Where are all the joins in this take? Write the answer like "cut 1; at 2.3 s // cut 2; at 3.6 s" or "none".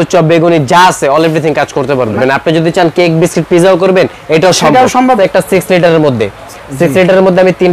cut 1; at 2.1 s // cut 2; at 5.2 s